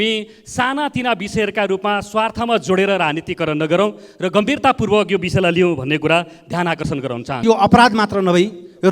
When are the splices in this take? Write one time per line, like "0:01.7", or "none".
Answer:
0:07.4